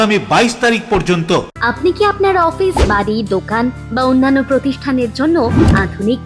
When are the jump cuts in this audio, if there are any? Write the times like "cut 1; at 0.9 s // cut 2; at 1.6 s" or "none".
cut 1; at 1.5 s